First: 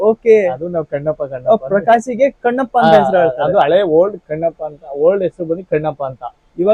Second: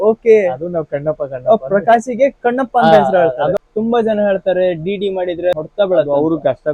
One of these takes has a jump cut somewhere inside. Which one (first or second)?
second